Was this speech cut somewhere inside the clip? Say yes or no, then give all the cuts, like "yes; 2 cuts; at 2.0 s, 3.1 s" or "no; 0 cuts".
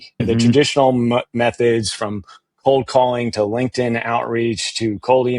no; 0 cuts